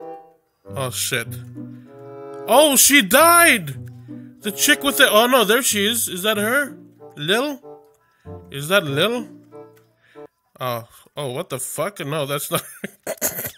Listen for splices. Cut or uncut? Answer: uncut